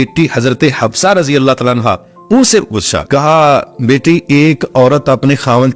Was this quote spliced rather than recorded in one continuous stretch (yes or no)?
yes